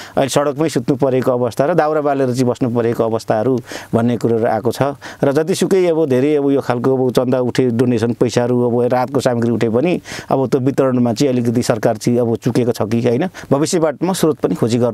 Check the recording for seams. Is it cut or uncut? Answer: cut